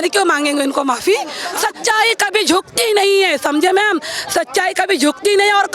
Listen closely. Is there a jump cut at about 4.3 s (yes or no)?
no